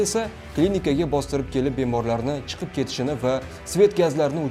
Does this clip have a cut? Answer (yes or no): no